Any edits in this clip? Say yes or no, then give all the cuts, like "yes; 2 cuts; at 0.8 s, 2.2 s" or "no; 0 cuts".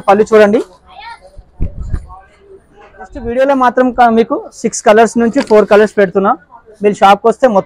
yes; 1 cut; at 3.3 s